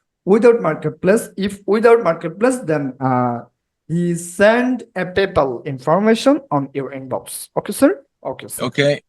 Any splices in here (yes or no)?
yes